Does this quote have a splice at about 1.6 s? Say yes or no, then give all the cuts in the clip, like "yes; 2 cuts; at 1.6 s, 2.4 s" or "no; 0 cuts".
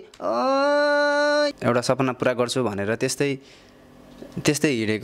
yes; 1 cut; at 1.6 s